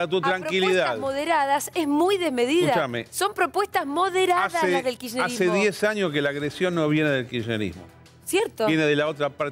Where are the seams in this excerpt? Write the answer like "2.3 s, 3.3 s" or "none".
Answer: none